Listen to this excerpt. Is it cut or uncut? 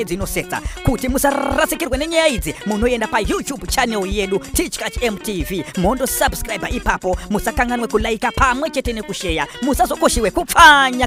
uncut